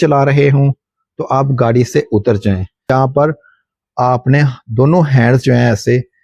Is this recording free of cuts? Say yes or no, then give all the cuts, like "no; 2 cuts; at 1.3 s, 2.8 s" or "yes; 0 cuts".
no; 1 cut; at 2.9 s